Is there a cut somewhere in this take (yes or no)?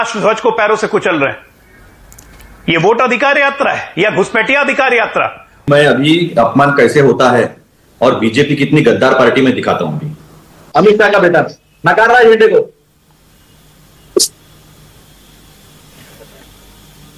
yes